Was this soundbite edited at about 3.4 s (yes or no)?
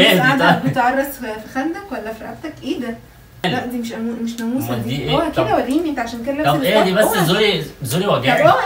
yes